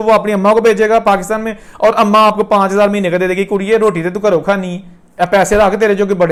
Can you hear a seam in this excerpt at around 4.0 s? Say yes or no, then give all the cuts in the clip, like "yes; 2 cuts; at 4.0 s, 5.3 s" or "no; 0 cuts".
no; 0 cuts